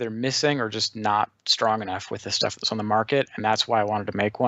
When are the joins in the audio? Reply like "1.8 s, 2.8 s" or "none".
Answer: none